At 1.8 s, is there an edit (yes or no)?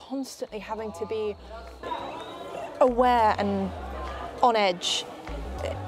yes